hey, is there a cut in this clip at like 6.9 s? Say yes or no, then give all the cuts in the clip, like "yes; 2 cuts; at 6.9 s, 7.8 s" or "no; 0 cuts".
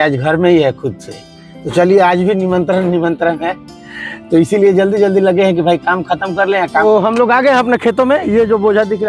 yes; 1 cut; at 6.9 s